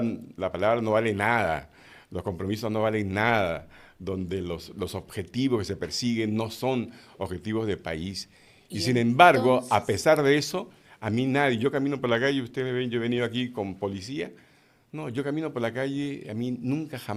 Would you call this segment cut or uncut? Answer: uncut